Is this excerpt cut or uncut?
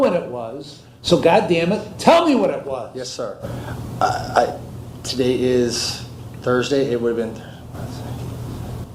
uncut